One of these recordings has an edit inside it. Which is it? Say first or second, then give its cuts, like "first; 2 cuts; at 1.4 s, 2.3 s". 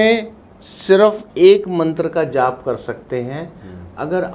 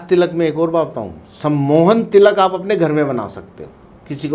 first; 1 cut; at 1.2 s